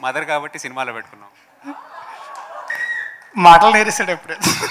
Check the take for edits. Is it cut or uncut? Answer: cut